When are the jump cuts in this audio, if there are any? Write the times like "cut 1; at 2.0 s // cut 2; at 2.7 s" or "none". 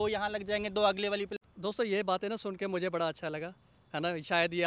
cut 1; at 1.4 s

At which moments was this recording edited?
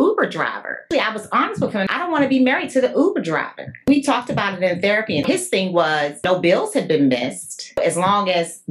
cut 1; at 0.8 s // cut 2; at 1.9 s // cut 3; at 3.9 s // cut 4; at 5.2 s // cut 5; at 6.2 s // cut 6; at 7.8 s

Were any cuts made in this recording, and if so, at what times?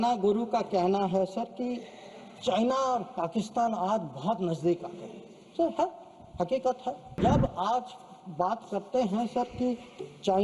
cut 1; at 7.2 s

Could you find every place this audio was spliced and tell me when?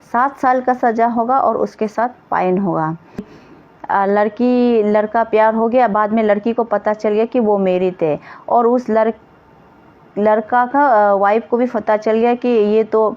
cut 1; at 3.4 s

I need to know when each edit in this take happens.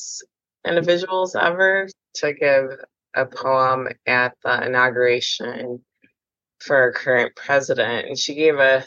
cut 1; at 2.0 s

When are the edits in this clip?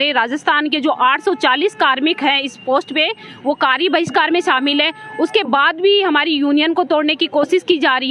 none

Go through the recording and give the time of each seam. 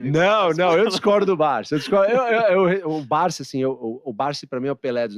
none

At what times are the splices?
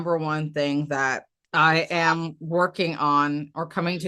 cut 1; at 1.3 s

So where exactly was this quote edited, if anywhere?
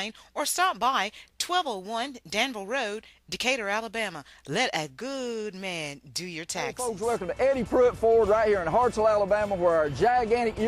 cut 1; at 6.8 s

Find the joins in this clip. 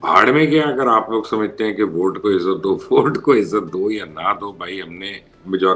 none

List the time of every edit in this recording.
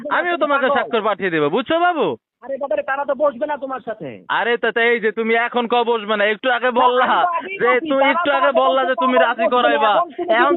none

